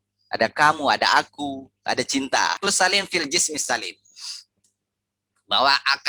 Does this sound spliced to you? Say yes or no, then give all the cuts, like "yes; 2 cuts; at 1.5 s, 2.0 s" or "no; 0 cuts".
yes; 1 cut; at 2.6 s